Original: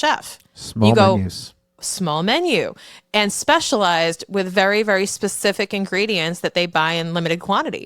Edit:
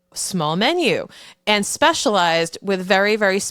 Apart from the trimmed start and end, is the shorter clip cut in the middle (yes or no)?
no